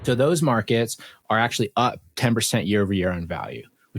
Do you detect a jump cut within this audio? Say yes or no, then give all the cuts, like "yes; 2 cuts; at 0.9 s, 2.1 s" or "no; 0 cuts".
no; 0 cuts